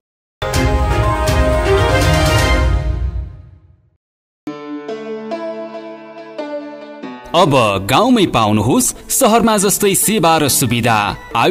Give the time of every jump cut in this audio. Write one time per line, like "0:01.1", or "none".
0:04.4